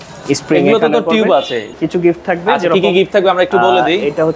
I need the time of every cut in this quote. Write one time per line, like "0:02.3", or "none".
0:01.7

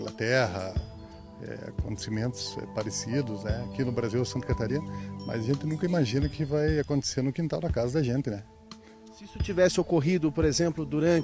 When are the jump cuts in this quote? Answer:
none

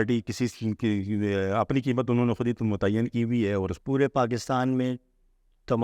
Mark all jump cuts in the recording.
0:03.8

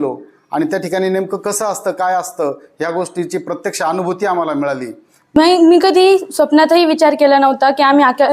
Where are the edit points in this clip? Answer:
0:05.4

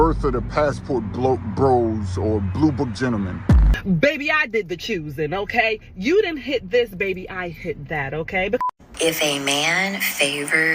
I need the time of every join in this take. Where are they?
0:03.7
0:08.6

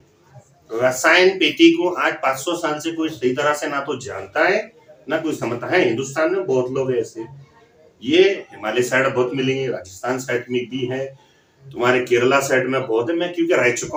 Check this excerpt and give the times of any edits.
none

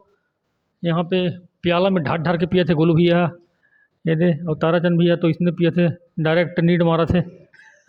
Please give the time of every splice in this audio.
none

